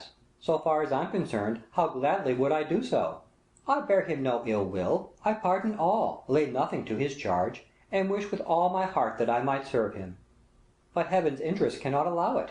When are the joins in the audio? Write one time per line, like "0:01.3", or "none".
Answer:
0:06.6